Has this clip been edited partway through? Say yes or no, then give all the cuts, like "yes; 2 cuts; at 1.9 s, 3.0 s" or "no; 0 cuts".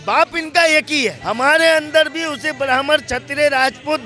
yes; 1 cut; at 1.2 s